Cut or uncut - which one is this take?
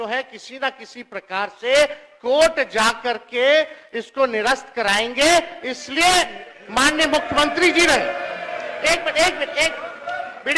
uncut